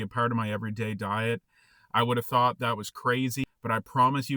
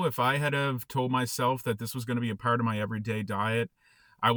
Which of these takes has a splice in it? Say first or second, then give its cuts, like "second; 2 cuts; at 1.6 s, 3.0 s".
first; 1 cut; at 3.5 s